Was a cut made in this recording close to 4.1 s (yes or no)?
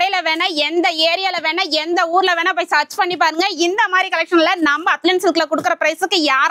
no